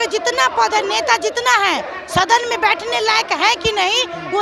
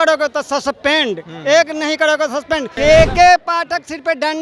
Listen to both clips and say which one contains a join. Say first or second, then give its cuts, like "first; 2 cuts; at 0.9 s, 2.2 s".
second; 1 cut; at 2.7 s